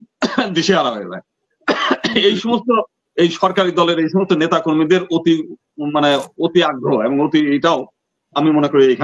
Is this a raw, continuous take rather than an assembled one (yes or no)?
yes